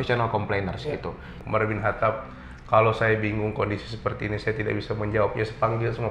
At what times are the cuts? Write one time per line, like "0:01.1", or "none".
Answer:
0:01.3

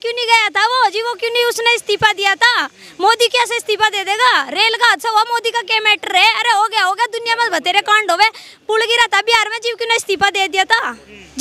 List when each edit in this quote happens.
none

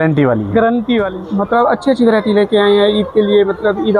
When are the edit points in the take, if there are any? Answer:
0:01.2

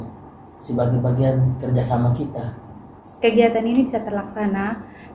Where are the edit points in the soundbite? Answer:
0:03.0

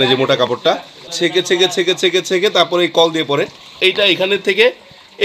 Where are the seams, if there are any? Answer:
0:01.1
0:03.7

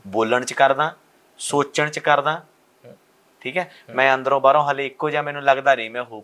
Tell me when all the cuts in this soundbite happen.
none

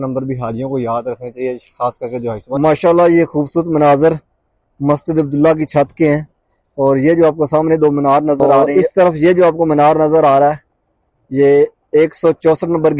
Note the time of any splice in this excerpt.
0:02.4
0:08.6

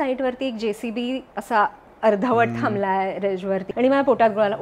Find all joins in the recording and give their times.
0:03.6

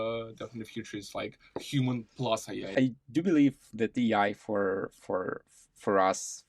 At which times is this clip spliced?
0:02.6

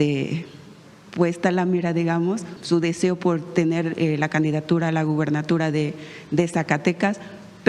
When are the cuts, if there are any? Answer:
0:02.5

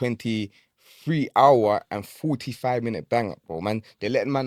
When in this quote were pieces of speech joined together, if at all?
none

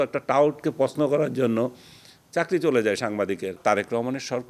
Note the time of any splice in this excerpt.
0:03.6

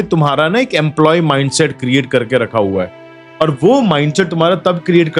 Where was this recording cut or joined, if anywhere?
none

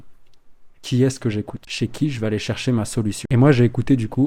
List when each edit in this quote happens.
none

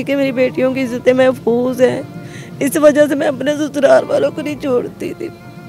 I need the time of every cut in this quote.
none

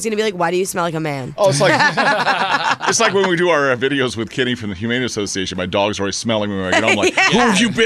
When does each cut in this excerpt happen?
none

